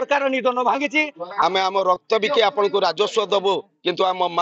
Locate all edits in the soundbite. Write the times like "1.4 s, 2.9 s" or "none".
1.2 s